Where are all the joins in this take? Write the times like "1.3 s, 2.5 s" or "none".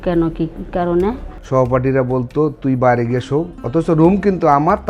1.3 s

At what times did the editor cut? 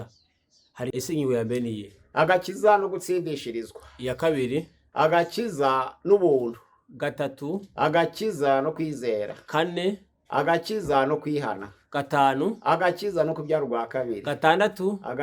0.9 s

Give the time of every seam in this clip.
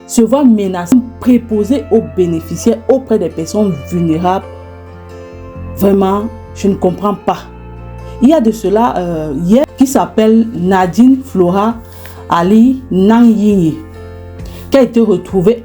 0.9 s, 9.6 s

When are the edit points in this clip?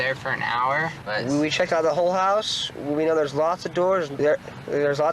1.0 s, 4.1 s

